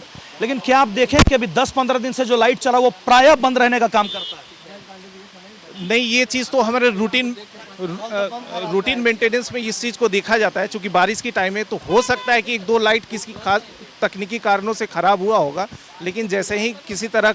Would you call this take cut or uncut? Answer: uncut